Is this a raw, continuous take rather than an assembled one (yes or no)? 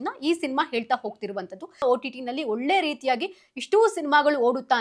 no